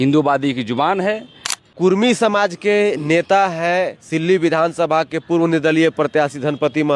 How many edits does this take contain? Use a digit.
1